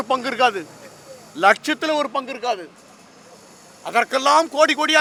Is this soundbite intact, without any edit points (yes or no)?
yes